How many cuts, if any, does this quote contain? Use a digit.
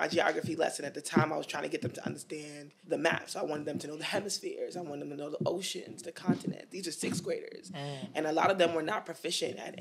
0